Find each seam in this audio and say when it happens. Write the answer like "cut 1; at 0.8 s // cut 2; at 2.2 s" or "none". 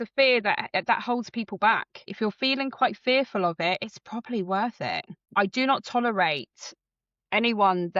cut 1; at 2.1 s // cut 2; at 5.3 s